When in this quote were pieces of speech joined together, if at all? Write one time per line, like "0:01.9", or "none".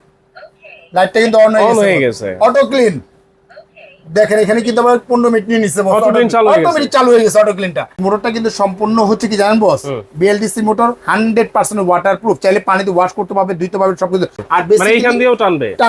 0:08.0
0:14.4